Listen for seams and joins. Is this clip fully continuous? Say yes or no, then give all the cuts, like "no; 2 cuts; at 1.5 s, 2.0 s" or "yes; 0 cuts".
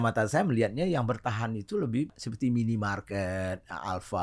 no; 1 cut; at 2.2 s